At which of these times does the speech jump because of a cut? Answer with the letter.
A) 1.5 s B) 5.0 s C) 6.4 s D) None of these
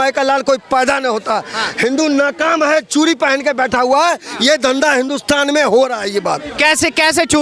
D